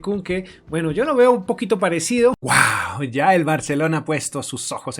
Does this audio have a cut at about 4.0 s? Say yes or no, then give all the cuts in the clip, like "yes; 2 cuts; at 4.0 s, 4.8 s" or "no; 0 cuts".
no; 1 cut; at 2.4 s